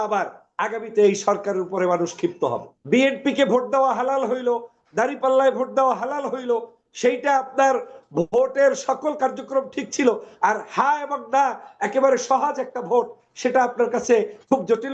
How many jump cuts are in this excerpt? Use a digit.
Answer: 1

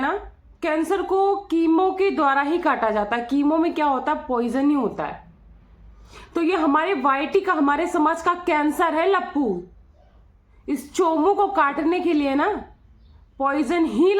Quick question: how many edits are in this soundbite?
0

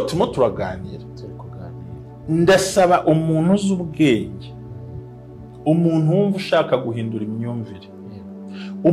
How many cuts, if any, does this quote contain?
0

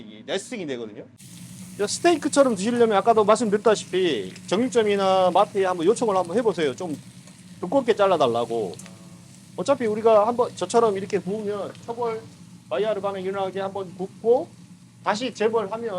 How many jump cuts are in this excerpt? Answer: 1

